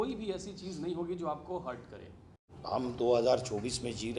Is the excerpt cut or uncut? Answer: cut